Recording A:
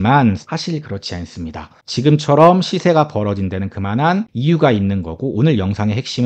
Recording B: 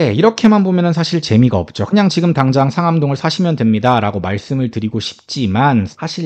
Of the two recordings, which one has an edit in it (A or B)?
A